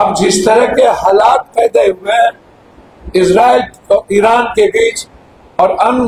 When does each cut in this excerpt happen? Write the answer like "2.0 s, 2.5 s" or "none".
none